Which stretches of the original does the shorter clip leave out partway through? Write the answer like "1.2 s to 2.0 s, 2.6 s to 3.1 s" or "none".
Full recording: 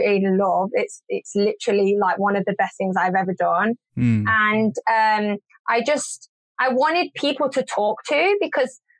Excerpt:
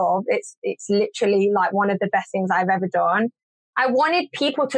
3.9 s to 6.2 s